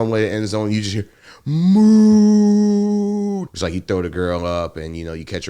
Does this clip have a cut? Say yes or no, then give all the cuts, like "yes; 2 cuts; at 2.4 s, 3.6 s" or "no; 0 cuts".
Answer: yes; 1 cut; at 3.5 s